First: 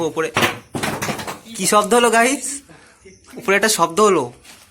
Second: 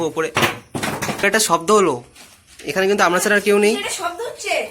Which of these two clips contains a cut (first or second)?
second